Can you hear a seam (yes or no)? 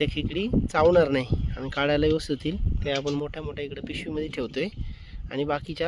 no